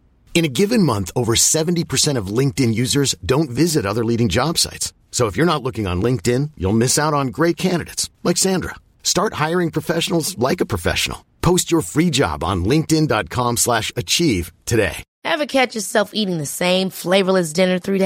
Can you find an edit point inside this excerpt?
yes; 1 cut; at 15.1 s

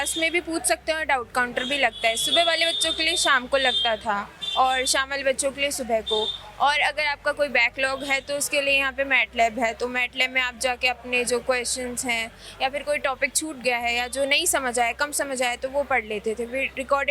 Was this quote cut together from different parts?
no; 0 cuts

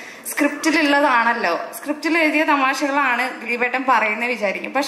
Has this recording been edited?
no; 0 cuts

